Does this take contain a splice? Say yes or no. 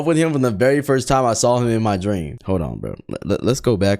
yes